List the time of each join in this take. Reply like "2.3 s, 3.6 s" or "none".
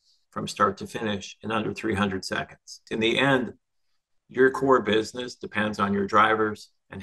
2.7 s